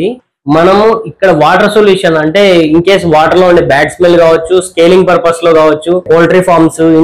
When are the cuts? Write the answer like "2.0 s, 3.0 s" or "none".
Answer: 6.0 s

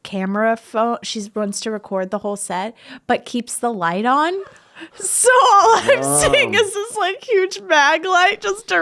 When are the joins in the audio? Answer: none

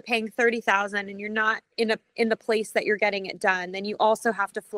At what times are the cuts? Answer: none

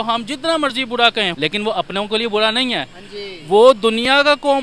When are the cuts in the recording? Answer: 1.3 s

